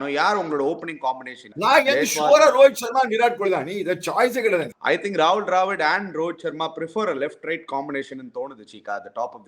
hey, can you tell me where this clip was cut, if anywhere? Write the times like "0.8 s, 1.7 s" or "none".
1.4 s, 4.7 s